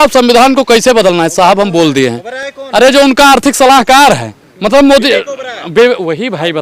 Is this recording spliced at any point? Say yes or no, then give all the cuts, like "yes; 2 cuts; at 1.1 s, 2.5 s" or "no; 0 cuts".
no; 0 cuts